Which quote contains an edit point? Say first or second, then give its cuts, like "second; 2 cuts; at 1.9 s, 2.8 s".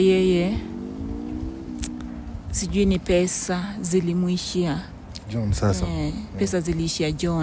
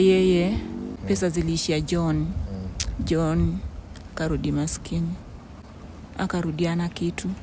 second; 1 cut; at 1.0 s